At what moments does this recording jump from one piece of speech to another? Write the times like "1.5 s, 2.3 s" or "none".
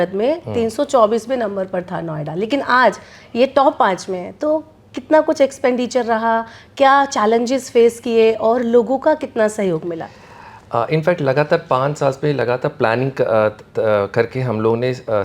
none